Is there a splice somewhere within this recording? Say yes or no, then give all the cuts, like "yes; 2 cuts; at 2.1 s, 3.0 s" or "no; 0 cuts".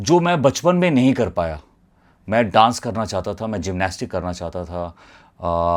no; 0 cuts